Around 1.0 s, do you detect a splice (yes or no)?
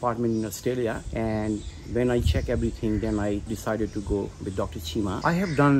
no